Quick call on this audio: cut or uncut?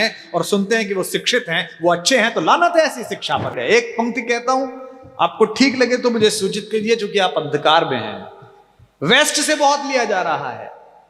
cut